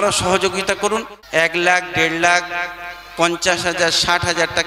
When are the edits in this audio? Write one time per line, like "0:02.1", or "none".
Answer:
0:01.2

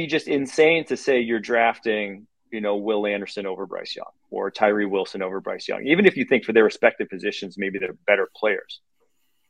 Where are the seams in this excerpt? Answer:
none

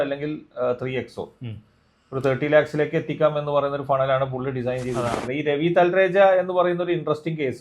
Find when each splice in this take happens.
0:05.2

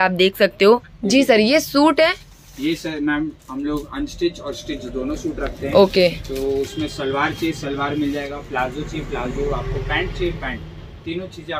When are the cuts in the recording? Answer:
0:00.9

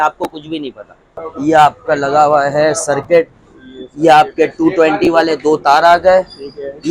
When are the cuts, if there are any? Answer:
0:01.3

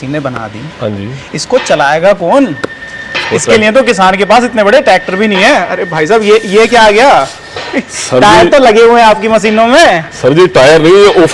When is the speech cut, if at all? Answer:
none

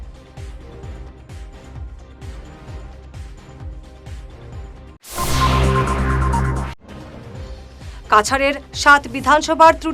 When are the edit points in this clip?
0:06.8

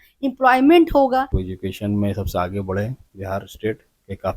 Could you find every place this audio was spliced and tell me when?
0:01.4

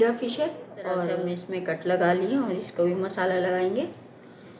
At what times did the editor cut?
0:01.4

